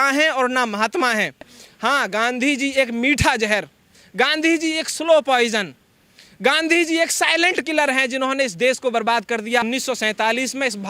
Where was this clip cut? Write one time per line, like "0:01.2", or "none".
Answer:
none